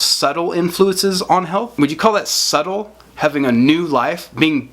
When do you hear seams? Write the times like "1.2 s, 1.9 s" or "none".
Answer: 1.7 s